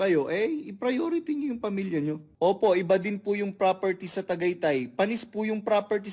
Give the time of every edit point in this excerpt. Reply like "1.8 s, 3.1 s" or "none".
2.3 s